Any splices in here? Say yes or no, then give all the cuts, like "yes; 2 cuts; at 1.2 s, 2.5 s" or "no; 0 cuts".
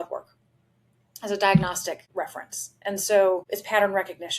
yes; 2 cuts; at 2.0 s, 3.4 s